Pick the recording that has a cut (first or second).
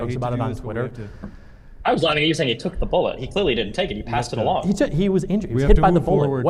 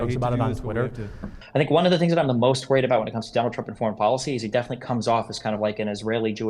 second